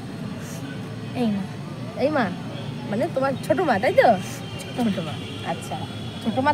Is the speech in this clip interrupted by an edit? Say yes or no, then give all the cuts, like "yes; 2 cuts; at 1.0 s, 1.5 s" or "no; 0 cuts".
no; 0 cuts